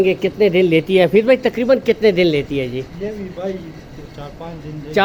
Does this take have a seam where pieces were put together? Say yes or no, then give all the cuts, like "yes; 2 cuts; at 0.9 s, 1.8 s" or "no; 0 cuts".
no; 0 cuts